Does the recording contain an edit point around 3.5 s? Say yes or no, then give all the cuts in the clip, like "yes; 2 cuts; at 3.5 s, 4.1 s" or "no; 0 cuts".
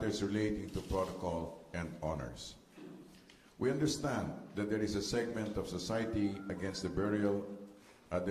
no; 1 cut; at 1.6 s